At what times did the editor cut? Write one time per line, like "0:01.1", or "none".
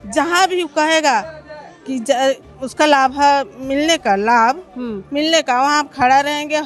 none